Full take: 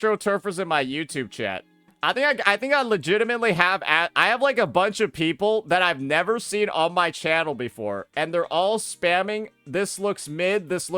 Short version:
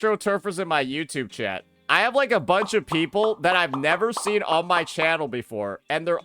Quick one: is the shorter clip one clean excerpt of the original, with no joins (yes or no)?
no